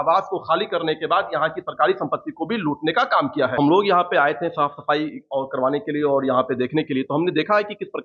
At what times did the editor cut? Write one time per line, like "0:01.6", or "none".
0:03.5